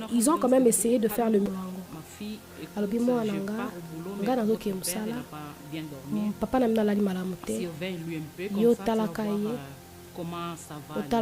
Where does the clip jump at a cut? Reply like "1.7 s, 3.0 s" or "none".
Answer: 1.5 s